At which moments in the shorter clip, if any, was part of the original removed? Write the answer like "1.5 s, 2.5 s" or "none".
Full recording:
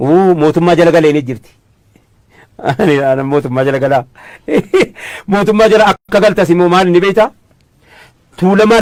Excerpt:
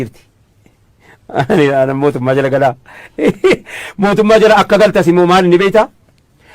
4.6 s

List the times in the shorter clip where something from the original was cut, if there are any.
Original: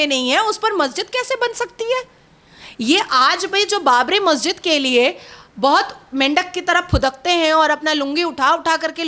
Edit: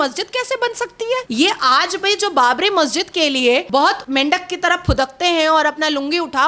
1.3 s, 3.9 s

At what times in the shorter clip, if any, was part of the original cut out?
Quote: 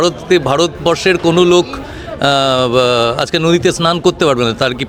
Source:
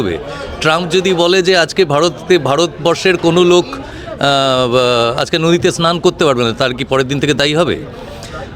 none

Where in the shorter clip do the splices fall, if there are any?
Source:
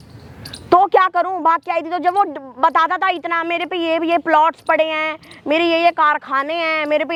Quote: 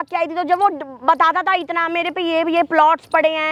none

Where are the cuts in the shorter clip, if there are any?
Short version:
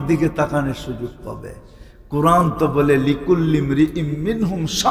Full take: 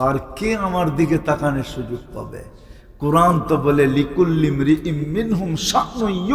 none

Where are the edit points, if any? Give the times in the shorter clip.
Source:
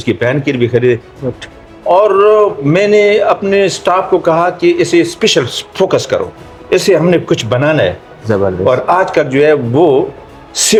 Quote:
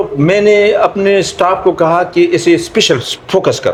none

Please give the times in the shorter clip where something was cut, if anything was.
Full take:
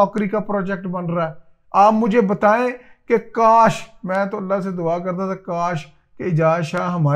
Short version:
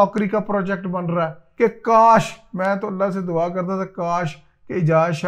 1.4 s

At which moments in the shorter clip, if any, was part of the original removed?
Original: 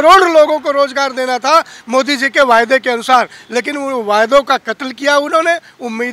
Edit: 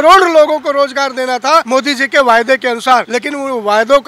1.7 s, 3.1 s

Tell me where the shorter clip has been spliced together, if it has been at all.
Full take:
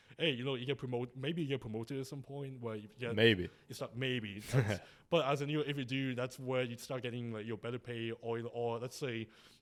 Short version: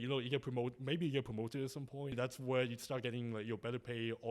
2.1 s

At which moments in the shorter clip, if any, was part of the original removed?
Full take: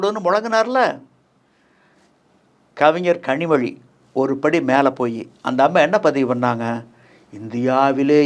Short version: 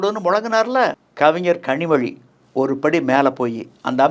1.0 s

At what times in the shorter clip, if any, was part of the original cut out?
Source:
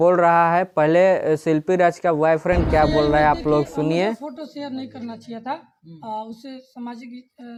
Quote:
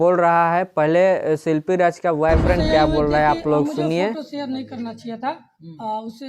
4.2 s

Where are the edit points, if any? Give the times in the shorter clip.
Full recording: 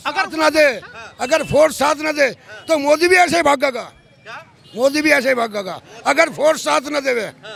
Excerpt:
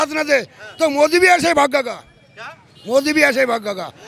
none

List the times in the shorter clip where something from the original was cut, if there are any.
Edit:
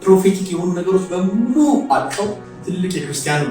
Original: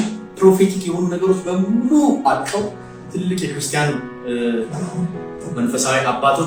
2.5 s

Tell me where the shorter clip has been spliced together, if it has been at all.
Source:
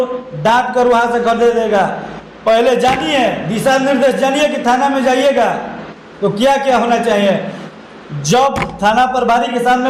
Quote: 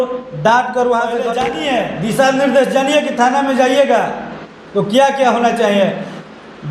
1.4 s

